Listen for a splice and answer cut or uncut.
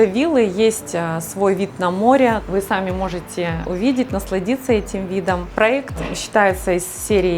cut